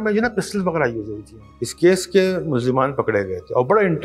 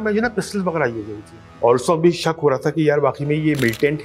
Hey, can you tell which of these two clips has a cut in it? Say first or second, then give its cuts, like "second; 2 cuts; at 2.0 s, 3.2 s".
first; 1 cut; at 1.4 s